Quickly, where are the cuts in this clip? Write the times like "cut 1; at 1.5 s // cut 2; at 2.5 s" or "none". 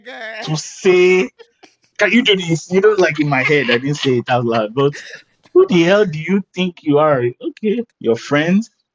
cut 1; at 7.9 s